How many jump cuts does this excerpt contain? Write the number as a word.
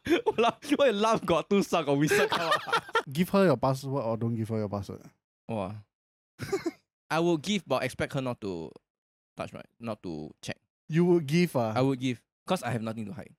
two